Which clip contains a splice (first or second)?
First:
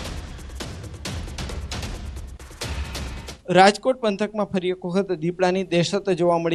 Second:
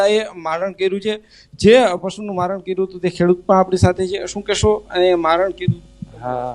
second